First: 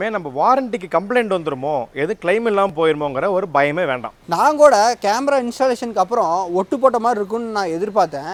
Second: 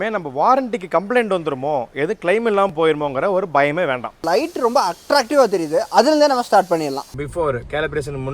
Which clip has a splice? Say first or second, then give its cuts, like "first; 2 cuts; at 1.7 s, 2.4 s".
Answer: second; 2 cuts; at 4.2 s, 7.2 s